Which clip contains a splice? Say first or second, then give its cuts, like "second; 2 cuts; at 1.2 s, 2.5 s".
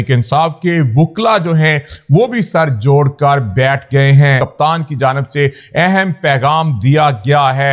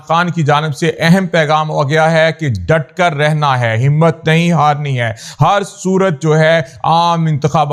first; 1 cut; at 4.4 s